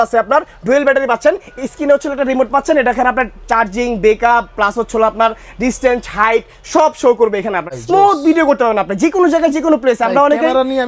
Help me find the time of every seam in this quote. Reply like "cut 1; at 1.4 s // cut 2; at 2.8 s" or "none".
cut 1; at 7.7 s